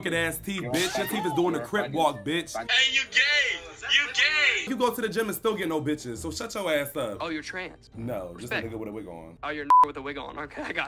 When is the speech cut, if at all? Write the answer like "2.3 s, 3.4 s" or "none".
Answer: 2.7 s, 4.7 s, 7.2 s

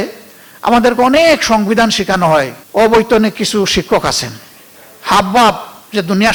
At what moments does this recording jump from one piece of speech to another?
none

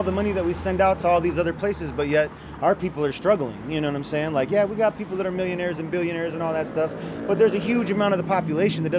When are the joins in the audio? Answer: none

